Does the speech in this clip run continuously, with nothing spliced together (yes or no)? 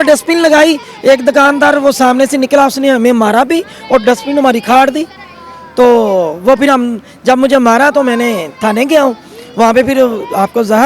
yes